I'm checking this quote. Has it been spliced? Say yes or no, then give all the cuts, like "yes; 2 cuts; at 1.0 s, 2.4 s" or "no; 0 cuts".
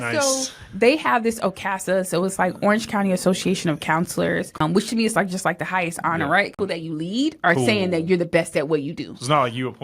yes; 2 cuts; at 4.6 s, 6.6 s